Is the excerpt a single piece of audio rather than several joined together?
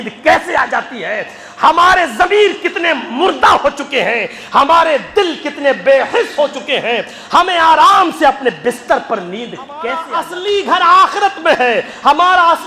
no; 1 cut; at 10.1 s

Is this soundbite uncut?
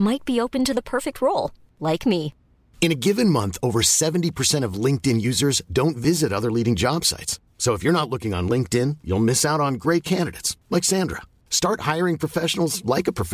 yes; 0 cuts

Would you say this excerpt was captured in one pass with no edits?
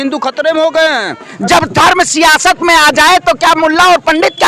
no; 1 cut; at 1.3 s

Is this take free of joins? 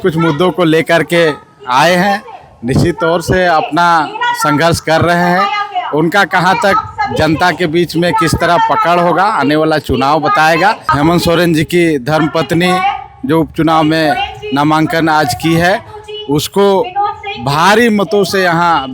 no; 1 cut; at 10.8 s

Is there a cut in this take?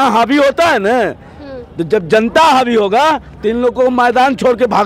no; 0 cuts

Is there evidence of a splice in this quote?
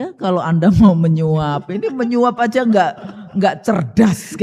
no; 0 cuts

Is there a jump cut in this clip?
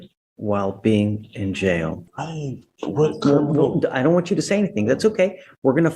yes; 1 cut; at 2.0 s

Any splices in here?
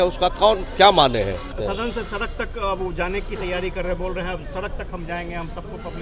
yes; 1 cut; at 1.6 s

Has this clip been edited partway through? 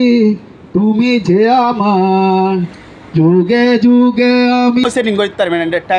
yes; 1 cut; at 4.8 s

